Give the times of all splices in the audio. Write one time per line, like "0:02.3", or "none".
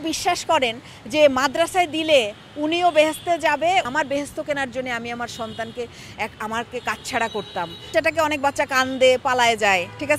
0:03.9
0:07.9